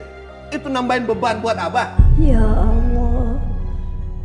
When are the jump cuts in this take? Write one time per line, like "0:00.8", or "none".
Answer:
none